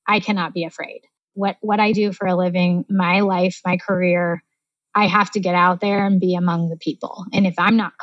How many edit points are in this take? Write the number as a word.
two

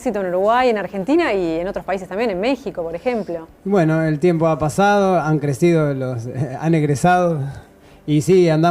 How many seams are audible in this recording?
one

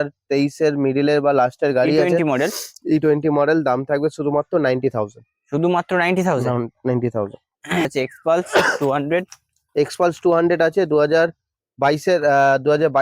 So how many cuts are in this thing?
one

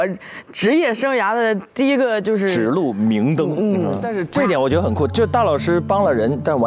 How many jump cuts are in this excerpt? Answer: one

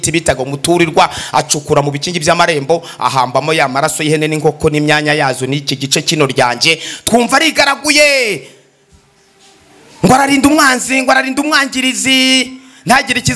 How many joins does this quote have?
zero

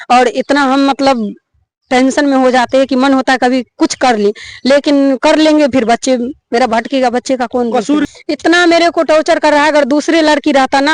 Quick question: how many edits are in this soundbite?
one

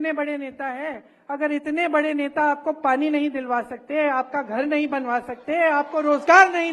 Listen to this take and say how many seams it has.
zero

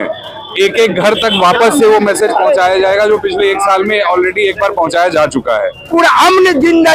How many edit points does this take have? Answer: one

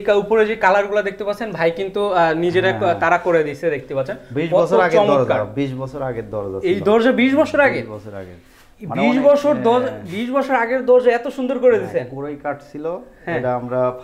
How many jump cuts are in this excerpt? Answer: zero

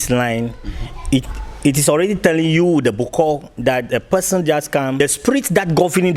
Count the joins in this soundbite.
one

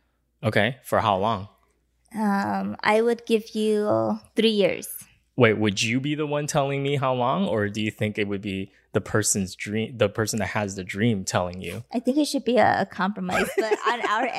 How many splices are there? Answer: zero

